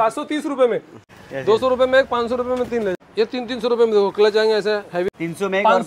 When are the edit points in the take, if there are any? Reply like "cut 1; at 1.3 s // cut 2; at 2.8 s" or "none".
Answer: cut 1; at 1.0 s // cut 2; at 2.9 s // cut 3; at 5.1 s